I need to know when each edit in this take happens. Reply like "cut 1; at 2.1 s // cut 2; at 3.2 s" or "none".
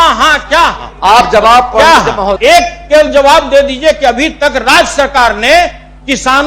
cut 1; at 2.3 s